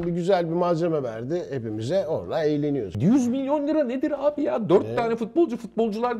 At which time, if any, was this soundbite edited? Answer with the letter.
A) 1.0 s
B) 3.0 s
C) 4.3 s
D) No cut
B